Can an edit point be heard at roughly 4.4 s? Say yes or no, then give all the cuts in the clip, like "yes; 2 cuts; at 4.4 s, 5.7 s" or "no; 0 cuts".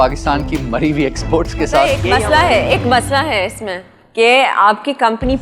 no; 1 cut; at 2.1 s